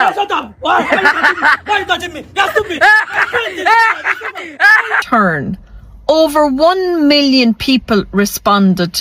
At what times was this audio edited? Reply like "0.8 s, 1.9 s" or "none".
5.0 s